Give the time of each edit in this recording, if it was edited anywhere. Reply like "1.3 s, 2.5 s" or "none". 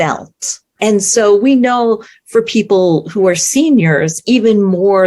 none